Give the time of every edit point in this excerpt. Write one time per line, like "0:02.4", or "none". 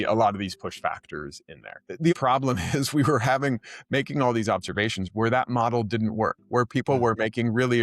0:02.1
0:05.1